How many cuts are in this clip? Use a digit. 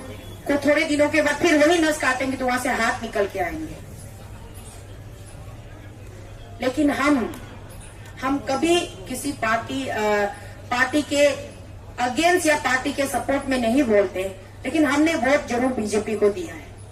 0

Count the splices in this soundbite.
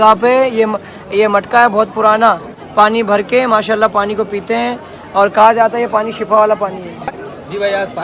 2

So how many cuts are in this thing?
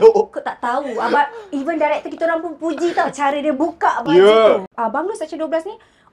1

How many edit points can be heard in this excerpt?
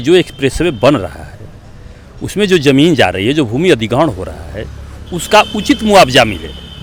0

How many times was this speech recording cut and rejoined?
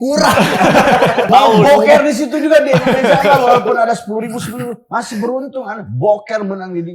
1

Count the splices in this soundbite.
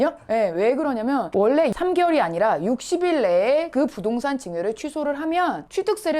1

